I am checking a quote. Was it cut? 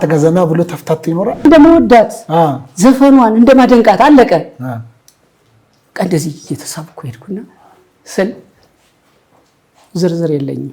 yes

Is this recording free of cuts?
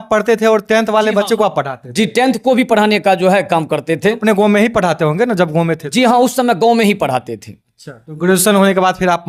yes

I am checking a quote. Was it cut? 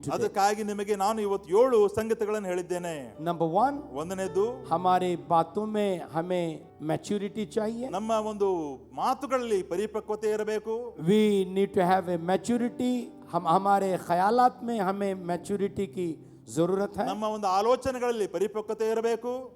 yes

